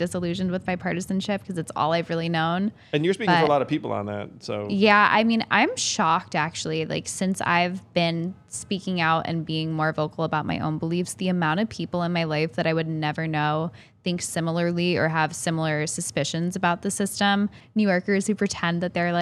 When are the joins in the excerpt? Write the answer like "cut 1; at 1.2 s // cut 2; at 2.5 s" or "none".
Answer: cut 1; at 17.6 s